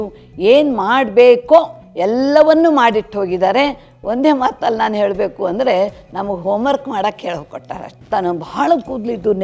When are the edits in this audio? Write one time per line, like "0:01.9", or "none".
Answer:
0:07.9